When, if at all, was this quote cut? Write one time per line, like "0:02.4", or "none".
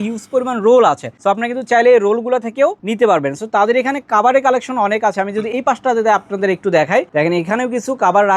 none